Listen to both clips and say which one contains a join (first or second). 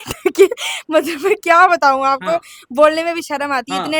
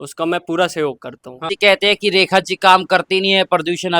second